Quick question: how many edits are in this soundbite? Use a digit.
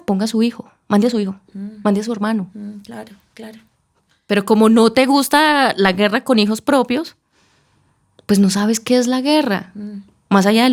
0